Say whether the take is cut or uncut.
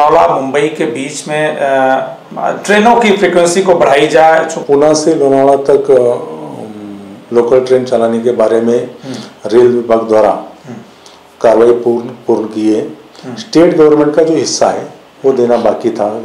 cut